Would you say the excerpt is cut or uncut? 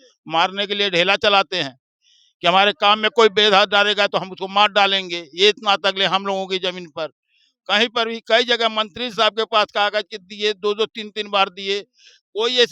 uncut